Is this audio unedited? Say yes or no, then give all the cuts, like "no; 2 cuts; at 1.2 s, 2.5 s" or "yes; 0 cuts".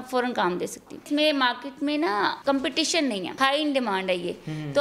no; 3 cuts; at 1.1 s, 2.4 s, 3.3 s